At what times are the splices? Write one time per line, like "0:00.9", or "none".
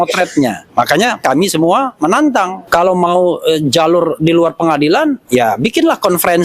0:01.2
0:02.6
0:05.2